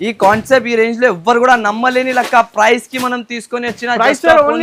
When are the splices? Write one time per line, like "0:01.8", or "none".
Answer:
none